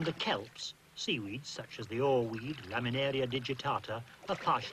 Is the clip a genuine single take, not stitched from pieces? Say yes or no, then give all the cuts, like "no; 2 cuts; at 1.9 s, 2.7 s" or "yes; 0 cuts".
no; 1 cut; at 2.8 s